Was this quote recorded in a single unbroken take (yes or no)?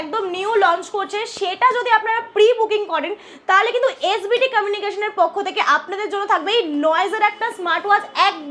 yes